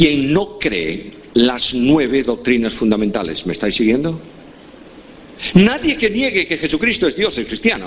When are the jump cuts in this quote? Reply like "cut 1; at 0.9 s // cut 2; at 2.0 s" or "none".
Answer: cut 1; at 6.3 s